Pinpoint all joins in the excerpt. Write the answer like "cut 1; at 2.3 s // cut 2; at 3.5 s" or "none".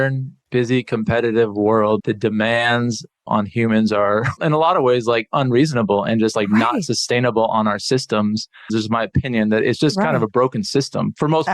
cut 1; at 2.0 s // cut 2; at 3.2 s // cut 3; at 4.3 s // cut 4; at 8.7 s